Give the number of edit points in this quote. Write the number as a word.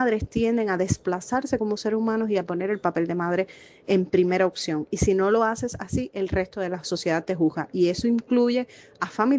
zero